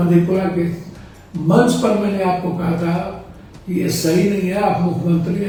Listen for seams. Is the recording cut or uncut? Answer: uncut